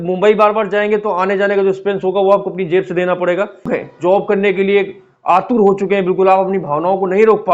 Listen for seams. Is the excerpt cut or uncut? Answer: cut